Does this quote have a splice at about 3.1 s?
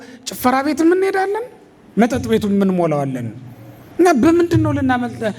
no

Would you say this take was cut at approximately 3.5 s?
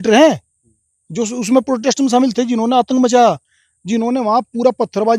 no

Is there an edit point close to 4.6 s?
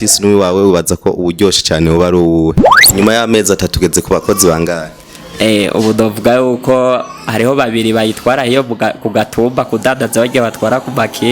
no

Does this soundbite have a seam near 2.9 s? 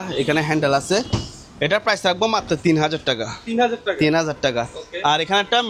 no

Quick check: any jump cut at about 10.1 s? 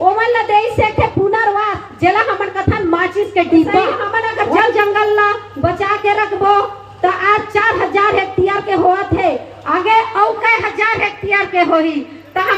no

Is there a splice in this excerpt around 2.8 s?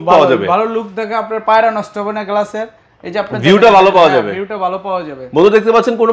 no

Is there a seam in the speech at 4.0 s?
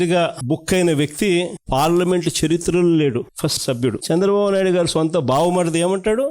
yes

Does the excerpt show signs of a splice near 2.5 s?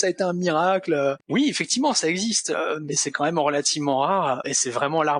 no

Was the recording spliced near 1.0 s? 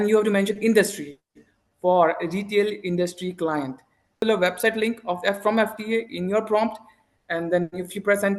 no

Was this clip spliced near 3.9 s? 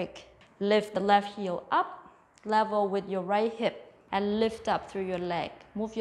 yes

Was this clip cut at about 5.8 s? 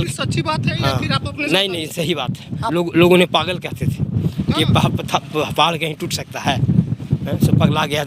no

